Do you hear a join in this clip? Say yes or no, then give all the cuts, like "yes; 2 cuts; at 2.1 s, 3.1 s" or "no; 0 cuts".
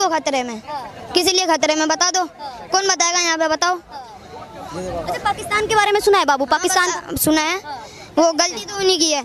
no; 0 cuts